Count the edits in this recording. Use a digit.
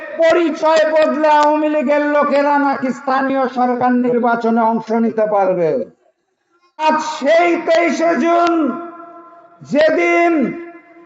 1